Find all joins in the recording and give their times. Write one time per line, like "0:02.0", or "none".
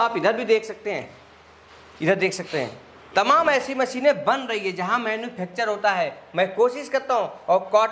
none